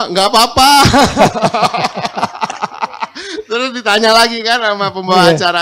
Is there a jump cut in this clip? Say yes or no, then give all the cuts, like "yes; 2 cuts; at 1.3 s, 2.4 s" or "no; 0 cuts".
no; 0 cuts